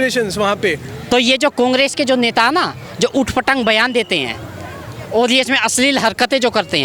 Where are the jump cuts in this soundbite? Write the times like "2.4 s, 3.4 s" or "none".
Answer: 0.9 s

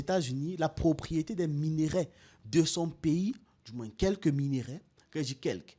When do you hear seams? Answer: none

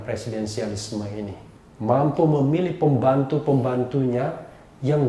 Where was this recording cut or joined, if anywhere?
none

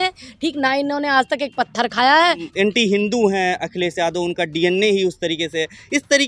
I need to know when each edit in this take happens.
2.5 s

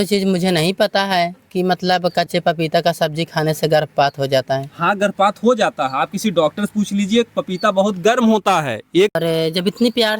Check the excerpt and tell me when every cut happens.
9.2 s

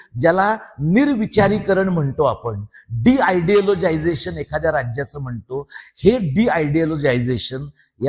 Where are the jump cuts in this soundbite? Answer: none

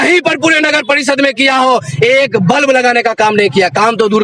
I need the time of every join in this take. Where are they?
none

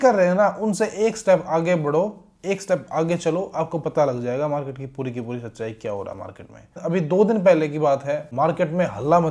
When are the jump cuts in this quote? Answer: none

